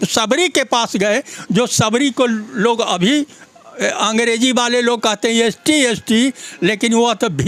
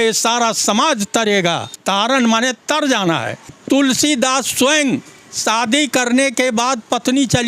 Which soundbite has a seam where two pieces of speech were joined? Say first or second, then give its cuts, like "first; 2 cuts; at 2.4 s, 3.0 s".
second; 2 cuts; at 1.7 s, 3.5 s